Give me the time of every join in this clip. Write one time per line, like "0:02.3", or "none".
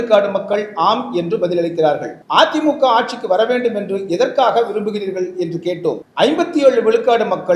0:02.1
0:06.1

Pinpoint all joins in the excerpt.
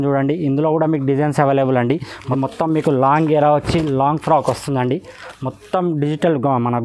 0:02.2

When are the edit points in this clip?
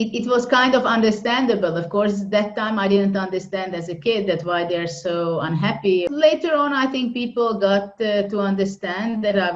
0:06.1

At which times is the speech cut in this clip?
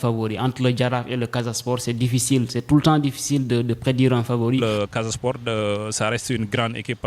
0:04.6

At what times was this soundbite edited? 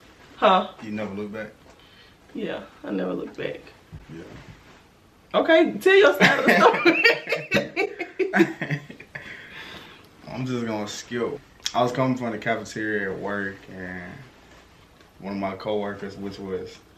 none

